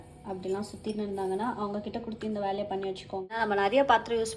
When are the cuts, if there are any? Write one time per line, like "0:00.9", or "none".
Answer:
0:03.3